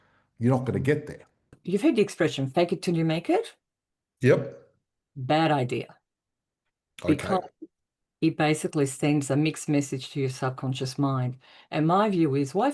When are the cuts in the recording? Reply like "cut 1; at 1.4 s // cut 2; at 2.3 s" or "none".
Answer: cut 1; at 1.5 s